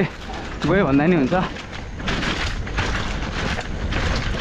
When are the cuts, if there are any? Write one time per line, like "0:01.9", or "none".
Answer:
none